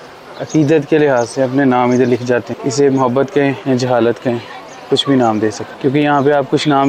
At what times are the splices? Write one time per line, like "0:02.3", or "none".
0:02.5
0:03.6
0:05.7